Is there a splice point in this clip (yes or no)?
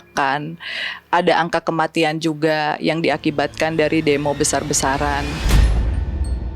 yes